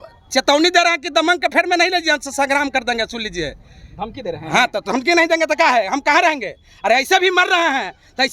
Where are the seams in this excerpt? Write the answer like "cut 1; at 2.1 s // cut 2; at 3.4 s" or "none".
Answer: none